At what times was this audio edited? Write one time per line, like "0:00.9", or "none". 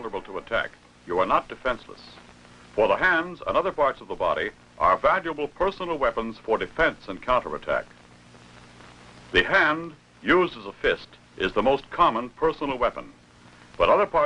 0:09.2